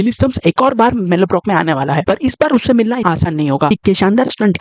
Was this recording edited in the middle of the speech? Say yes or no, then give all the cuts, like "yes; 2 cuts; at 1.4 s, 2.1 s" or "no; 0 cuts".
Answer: yes; 1 cut; at 3.7 s